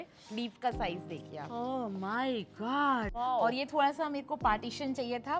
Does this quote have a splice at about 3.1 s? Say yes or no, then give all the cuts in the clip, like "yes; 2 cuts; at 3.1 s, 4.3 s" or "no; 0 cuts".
yes; 1 cut; at 3.1 s